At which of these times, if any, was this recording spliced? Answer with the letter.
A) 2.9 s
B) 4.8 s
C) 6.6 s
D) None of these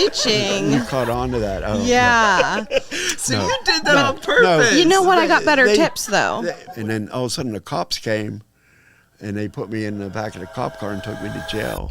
C